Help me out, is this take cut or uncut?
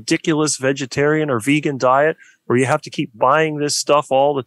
uncut